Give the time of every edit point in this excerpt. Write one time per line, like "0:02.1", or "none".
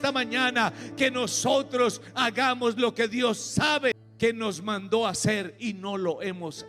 0:04.1